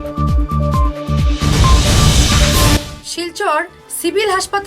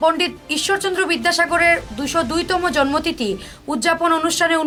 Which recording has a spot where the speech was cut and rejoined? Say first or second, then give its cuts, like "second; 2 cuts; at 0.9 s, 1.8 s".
first; 1 cut; at 2.7 s